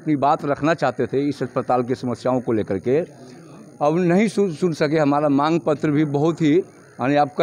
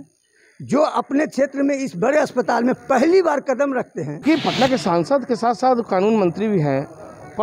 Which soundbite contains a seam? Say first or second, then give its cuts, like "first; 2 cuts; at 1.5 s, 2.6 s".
second; 1 cut; at 4.0 s